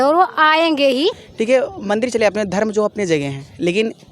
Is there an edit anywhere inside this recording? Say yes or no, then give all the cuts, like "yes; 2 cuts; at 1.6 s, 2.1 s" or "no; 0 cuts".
yes; 1 cut; at 1.3 s